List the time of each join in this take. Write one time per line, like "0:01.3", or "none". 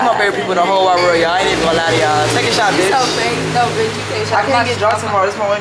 none

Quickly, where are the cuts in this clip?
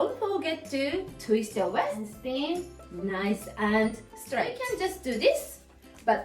0:02.1
0:04.6

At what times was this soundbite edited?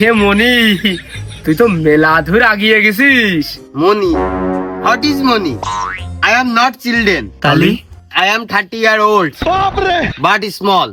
none

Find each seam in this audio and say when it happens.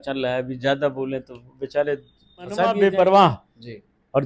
0:02.7

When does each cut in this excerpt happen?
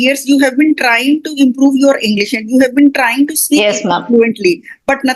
none

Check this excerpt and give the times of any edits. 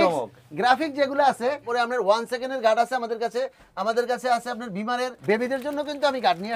0:01.7
0:05.2

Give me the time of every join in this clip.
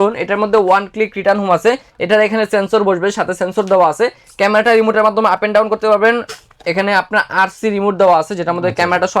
none

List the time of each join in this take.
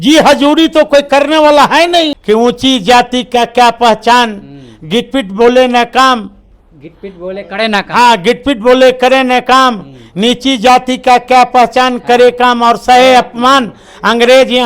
0:02.2

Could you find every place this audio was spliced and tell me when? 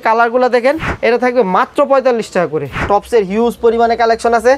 0:00.9
0:02.8

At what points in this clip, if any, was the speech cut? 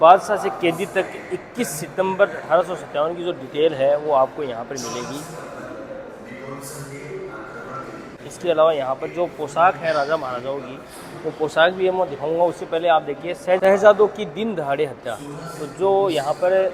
none

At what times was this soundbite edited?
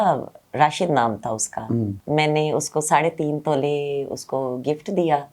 0:02.0

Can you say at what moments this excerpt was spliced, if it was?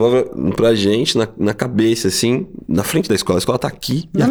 none

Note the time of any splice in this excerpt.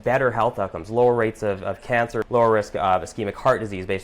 0:02.2

